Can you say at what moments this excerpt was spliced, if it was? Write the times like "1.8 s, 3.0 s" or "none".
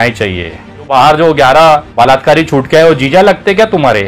0.9 s, 1.9 s